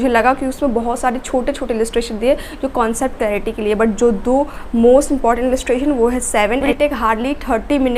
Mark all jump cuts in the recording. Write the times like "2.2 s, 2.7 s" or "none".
6.6 s